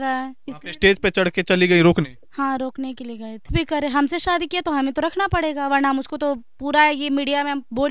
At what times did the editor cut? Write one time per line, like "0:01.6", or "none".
0:03.5